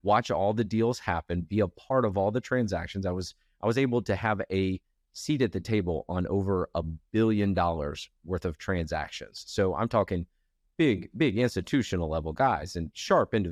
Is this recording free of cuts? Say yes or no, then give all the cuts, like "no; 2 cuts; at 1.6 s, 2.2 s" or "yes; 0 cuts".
yes; 0 cuts